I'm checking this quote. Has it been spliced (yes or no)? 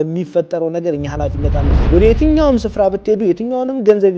yes